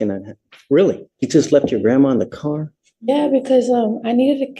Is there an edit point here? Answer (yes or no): yes